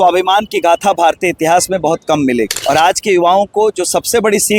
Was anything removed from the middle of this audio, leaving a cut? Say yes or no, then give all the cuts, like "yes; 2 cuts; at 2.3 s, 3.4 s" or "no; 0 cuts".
yes; 1 cut; at 2.6 s